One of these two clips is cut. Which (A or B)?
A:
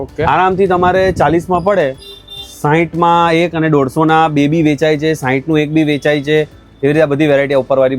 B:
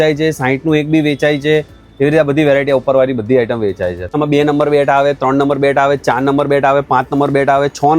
B